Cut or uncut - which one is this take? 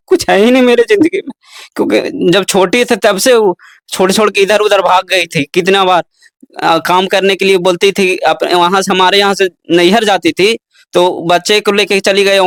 uncut